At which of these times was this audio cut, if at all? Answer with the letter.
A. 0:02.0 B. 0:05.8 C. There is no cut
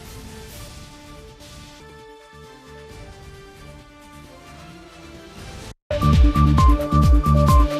B